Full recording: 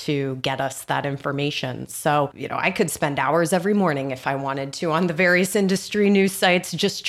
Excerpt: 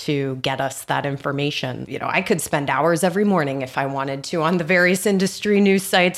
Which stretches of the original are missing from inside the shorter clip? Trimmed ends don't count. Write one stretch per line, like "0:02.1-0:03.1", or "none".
0:01.9-0:02.4